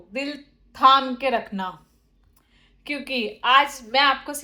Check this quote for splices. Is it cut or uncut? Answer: uncut